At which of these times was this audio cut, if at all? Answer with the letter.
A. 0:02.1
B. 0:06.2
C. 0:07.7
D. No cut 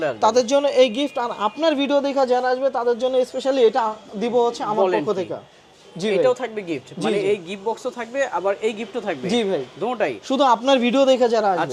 D